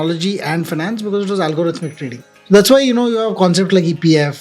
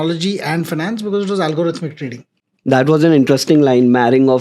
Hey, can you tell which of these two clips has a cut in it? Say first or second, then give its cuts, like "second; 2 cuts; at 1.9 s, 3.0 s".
first; 1 cut; at 2.3 s